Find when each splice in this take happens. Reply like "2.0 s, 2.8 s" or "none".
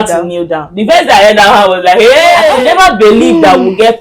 2.6 s